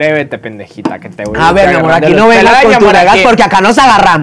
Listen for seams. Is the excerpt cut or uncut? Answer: uncut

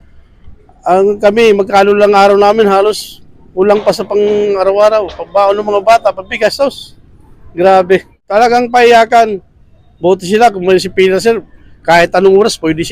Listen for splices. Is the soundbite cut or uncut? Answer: cut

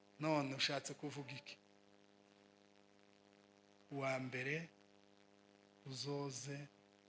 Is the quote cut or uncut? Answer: cut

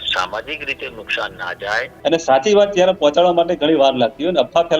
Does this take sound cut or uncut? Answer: cut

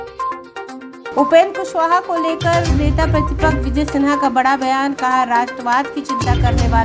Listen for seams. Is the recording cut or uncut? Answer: cut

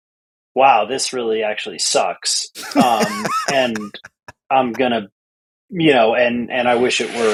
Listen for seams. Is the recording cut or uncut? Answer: uncut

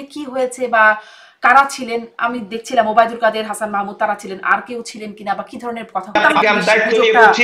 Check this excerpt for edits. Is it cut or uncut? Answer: cut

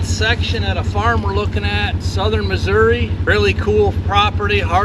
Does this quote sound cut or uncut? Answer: cut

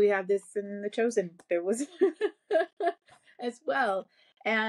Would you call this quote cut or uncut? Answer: uncut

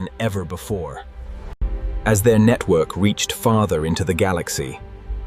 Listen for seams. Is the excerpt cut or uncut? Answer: cut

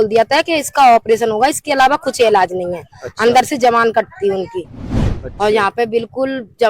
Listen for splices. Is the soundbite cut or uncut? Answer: cut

